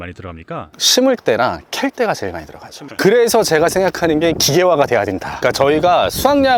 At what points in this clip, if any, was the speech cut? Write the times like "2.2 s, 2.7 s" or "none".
5.3 s